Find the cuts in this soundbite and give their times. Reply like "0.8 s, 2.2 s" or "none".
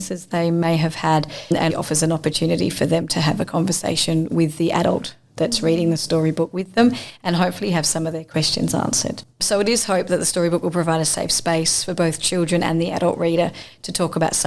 1.6 s, 9.3 s